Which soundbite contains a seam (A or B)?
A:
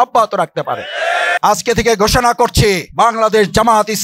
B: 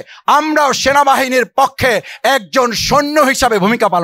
A